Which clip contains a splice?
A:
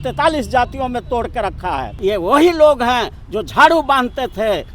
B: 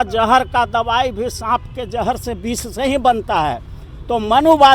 A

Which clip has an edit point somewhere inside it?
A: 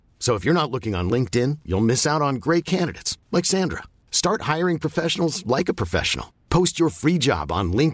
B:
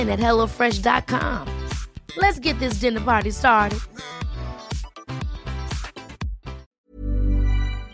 B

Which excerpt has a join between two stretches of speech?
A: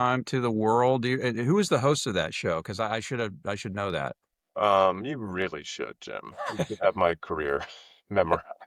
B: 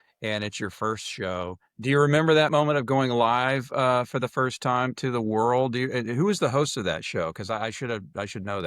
B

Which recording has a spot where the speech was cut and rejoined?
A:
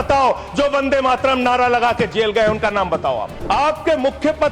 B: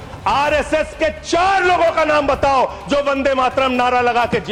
A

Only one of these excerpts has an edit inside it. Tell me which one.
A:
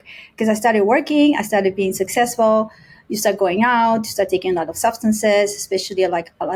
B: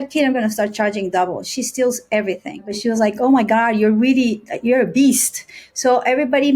B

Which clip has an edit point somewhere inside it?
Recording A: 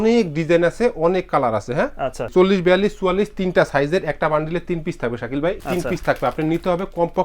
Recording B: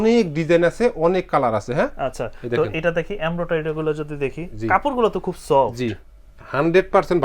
A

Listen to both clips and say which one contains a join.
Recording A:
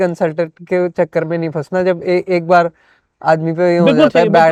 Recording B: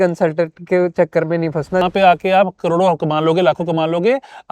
B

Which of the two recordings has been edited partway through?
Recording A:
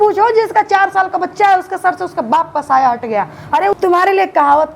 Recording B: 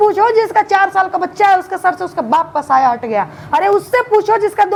A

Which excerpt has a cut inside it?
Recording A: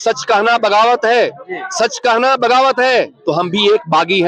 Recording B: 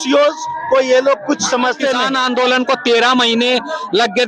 B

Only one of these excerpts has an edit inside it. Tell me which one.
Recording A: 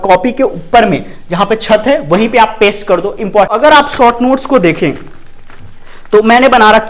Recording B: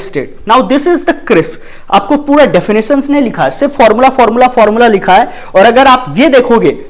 A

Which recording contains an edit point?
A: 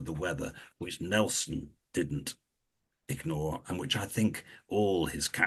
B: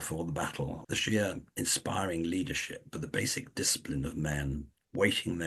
B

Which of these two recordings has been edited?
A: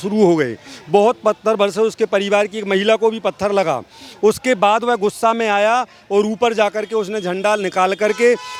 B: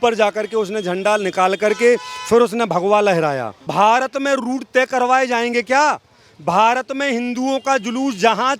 B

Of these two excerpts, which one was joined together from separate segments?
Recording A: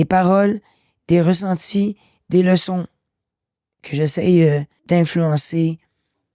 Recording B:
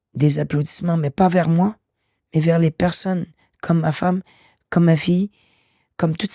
A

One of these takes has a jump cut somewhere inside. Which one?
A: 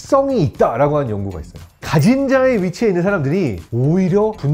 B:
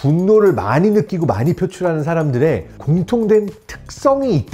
A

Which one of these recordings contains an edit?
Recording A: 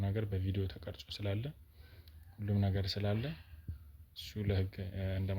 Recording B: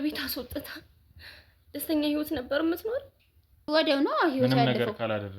B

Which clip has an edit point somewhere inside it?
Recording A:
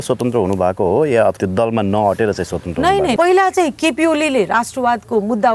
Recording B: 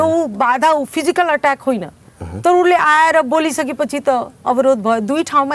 A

